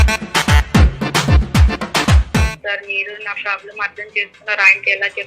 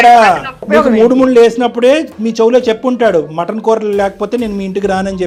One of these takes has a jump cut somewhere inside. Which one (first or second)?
first